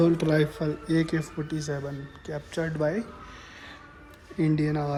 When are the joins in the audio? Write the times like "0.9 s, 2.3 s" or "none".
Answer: none